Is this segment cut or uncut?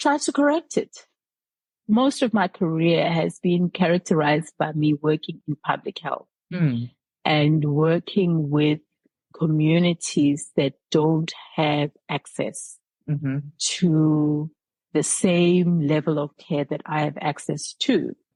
uncut